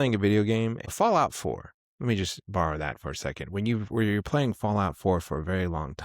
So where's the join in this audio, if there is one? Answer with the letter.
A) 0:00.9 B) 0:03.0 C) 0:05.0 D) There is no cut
A